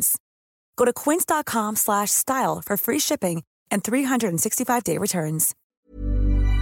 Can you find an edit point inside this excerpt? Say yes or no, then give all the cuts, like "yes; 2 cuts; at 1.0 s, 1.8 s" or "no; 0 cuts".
yes; 1 cut; at 5.6 s